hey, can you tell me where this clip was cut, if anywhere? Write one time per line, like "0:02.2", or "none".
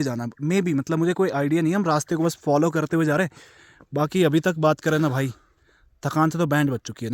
none